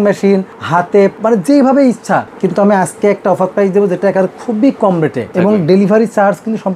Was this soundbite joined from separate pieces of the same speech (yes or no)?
yes